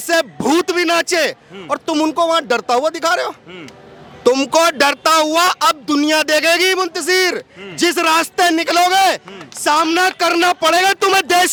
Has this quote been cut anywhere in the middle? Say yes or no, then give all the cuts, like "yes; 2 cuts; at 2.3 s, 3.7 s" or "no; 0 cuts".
no; 0 cuts